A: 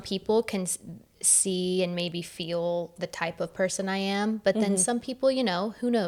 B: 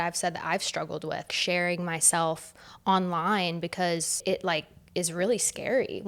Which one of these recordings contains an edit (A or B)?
B